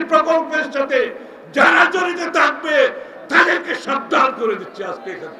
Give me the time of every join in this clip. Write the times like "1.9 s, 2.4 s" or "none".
none